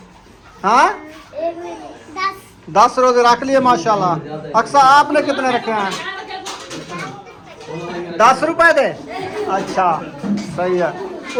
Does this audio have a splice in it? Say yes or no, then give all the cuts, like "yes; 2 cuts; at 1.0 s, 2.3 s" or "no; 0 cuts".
no; 0 cuts